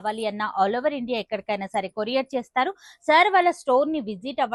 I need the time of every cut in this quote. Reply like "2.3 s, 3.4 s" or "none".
none